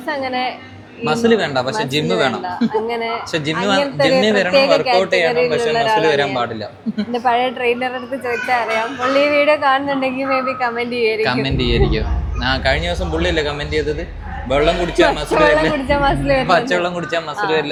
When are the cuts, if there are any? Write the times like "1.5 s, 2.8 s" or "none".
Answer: none